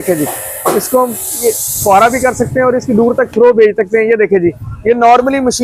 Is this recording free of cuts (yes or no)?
yes